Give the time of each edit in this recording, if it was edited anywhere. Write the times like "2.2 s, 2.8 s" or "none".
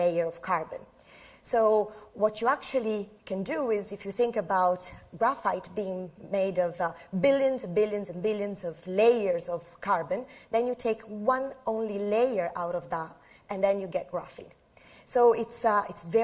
12.8 s